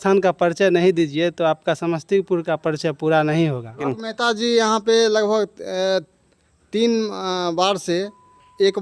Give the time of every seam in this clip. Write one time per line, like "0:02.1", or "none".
0:03.9